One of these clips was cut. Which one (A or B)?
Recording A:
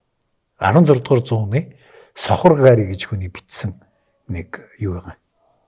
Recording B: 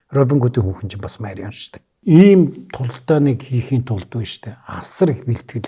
B